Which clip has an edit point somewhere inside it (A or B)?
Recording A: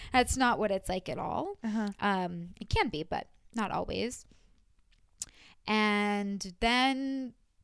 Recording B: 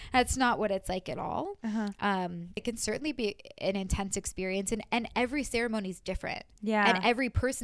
B